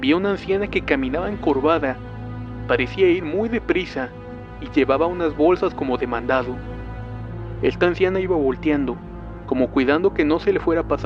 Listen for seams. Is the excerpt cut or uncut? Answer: cut